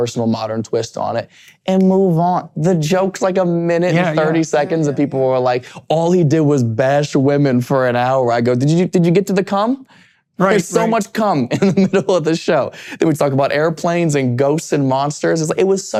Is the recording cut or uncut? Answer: uncut